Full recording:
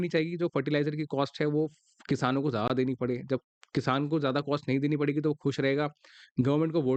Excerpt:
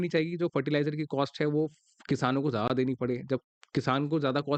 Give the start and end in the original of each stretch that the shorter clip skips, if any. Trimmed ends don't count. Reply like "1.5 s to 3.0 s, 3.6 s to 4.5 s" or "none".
none